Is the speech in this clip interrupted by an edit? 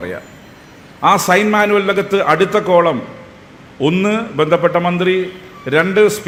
no; 0 cuts

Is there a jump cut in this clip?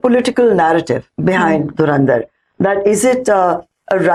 no; 0 cuts

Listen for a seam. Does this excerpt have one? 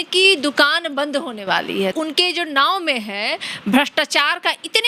yes; 1 cut; at 1.9 s

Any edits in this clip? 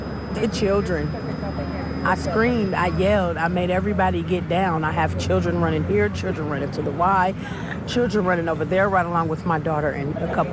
no; 0 cuts

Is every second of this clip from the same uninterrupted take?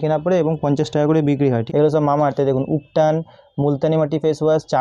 no; 1 cut; at 1.6 s

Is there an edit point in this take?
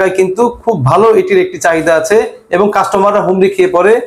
no; 0 cuts

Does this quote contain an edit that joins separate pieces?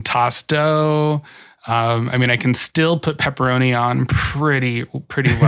no; 0 cuts

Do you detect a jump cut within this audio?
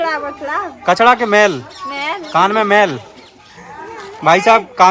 no; 0 cuts

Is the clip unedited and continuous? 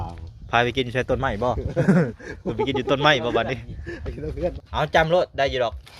no; 1 cut; at 4.6 s

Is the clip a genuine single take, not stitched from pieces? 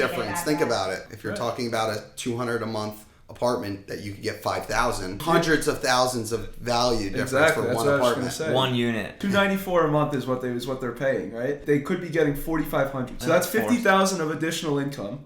no; 5 cuts; at 1.1 s, 5.2 s, 9.2 s, 11.6 s, 13.2 s

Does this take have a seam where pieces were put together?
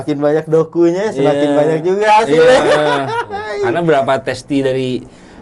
yes; 1 cut; at 3.7 s

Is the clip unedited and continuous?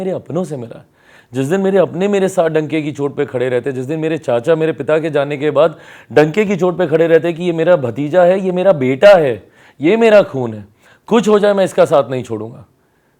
yes; 0 cuts

